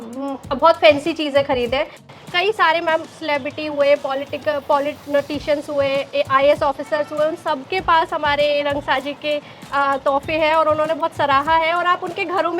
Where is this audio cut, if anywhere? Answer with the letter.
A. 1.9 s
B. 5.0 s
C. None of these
A